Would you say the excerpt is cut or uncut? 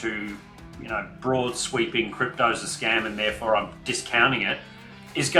uncut